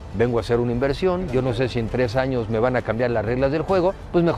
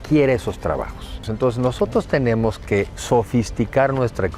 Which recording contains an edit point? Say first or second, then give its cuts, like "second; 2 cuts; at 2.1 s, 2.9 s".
second; 1 cut; at 1.2 s